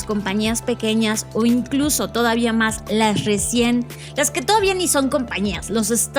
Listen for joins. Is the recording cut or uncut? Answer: uncut